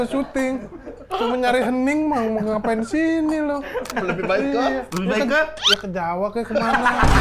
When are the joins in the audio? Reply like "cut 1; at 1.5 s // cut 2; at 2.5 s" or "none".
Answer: none